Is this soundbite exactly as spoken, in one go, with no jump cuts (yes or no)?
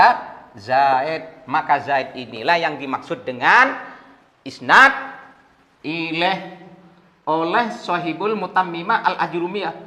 yes